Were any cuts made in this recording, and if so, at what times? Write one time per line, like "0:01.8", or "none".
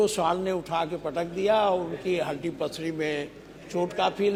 none